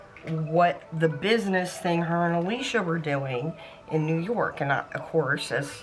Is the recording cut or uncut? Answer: uncut